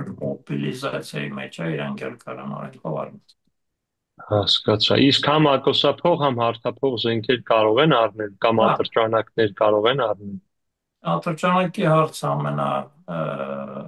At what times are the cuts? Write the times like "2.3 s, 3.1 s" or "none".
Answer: none